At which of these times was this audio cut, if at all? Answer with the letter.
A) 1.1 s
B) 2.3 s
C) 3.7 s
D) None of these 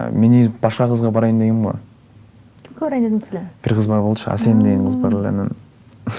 D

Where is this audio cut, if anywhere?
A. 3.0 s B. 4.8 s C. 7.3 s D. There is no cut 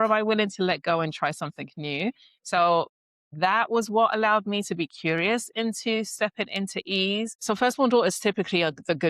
C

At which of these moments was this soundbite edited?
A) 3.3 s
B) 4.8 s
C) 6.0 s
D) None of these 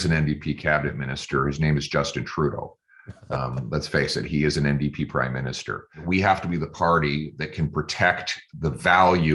C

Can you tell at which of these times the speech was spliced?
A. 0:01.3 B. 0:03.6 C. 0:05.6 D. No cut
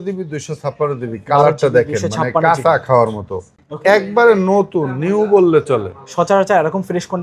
B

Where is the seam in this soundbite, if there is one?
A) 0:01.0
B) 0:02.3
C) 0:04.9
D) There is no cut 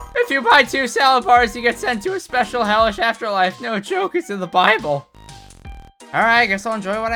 D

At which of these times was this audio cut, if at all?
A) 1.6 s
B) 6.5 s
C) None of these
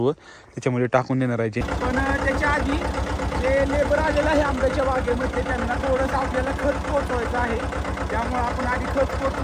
A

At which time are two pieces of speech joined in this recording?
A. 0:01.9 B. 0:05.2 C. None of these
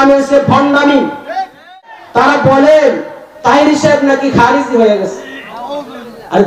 A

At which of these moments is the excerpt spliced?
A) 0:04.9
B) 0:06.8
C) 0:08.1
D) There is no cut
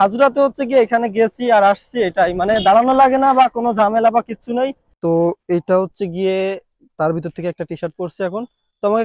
A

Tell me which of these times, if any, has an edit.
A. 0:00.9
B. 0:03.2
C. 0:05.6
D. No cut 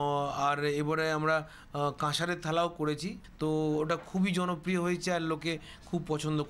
B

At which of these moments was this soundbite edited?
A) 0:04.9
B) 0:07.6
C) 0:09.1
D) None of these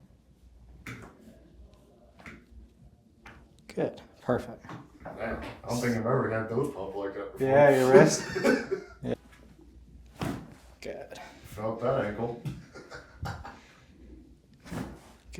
C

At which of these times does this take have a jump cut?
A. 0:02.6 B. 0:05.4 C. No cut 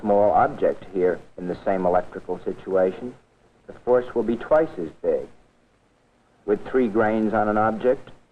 A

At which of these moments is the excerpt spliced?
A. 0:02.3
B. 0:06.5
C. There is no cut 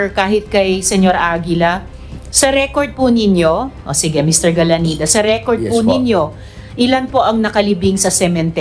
C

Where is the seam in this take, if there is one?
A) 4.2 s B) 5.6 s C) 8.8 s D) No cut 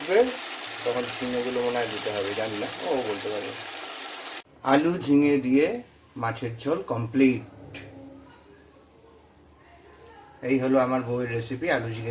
A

